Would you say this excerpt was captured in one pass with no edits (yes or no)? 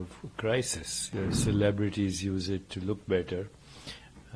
no